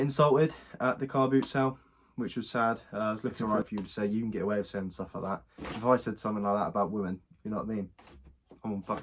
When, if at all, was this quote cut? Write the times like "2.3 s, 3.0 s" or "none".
3.4 s